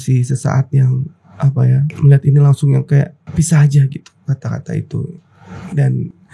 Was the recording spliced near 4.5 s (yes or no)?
no